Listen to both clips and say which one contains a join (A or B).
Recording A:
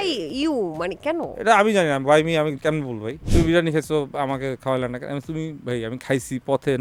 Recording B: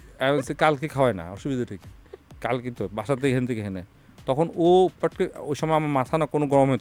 A